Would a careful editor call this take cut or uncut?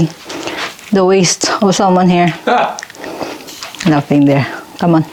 uncut